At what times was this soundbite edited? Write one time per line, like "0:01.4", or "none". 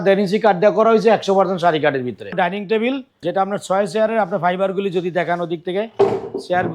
0:02.3
0:03.1